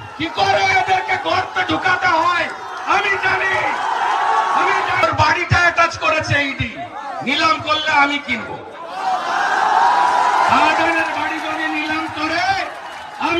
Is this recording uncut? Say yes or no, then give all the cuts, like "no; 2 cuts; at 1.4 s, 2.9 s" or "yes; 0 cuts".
no; 1 cut; at 5.0 s